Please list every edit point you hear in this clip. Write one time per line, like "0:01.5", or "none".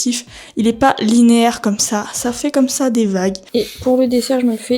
0:03.4